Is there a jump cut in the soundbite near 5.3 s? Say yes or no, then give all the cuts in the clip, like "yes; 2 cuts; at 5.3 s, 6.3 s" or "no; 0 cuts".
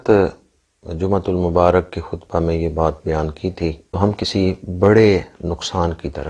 no; 1 cut; at 3.8 s